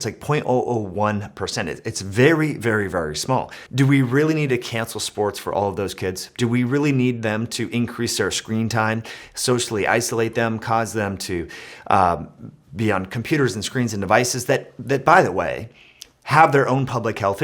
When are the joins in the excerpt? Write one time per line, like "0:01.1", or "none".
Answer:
0:03.6